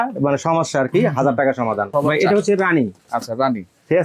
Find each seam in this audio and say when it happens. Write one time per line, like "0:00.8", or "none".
0:02.0